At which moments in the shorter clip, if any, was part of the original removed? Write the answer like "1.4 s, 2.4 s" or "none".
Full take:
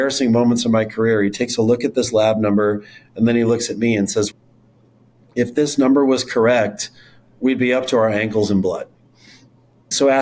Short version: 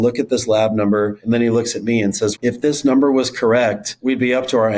1.2 s, 2.4 s, 3.9 s